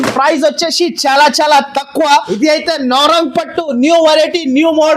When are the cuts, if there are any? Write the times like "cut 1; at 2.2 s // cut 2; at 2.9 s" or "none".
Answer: cut 1; at 2.3 s